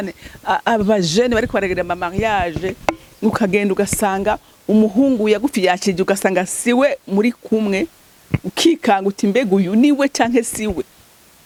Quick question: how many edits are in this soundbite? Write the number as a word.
zero